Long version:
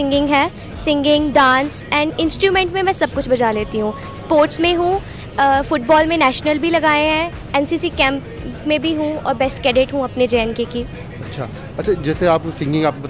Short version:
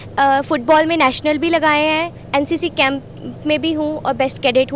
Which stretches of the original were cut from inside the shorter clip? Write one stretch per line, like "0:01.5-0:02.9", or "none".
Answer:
none